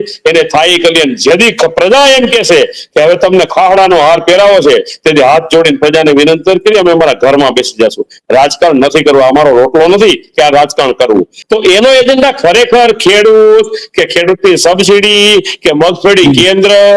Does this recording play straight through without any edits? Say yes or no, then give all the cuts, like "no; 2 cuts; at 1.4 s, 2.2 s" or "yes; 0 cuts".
no; 1 cut; at 11.4 s